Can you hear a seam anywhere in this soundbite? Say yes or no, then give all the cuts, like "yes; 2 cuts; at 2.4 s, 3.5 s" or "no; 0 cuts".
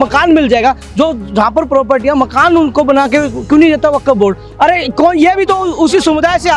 yes; 1 cut; at 4.5 s